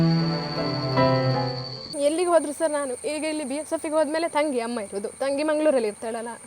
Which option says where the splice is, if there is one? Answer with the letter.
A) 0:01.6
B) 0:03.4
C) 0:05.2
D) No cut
A